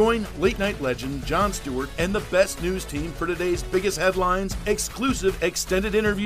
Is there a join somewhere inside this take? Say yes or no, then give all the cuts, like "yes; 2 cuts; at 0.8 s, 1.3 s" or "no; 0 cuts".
no; 0 cuts